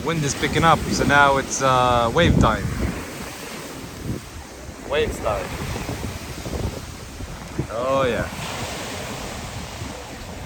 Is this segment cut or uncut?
uncut